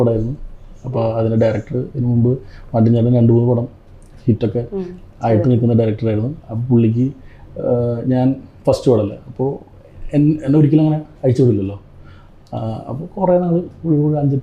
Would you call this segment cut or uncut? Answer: uncut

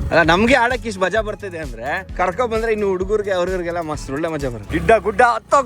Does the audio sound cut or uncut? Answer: cut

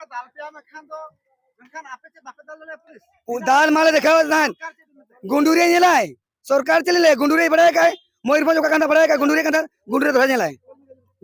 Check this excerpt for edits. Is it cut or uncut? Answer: uncut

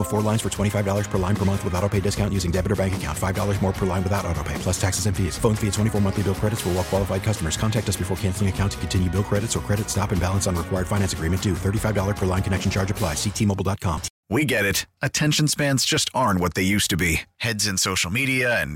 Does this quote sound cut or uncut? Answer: cut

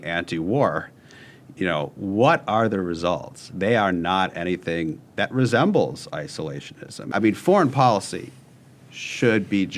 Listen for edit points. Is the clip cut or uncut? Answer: cut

